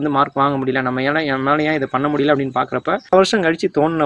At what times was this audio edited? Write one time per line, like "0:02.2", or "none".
0:03.1